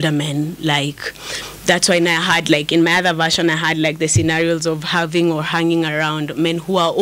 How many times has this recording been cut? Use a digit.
0